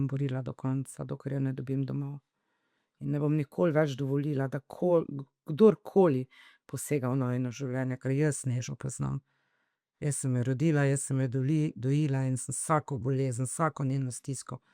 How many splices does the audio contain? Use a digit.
0